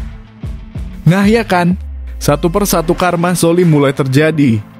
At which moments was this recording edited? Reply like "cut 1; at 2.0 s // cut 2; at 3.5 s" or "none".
cut 1; at 1.0 s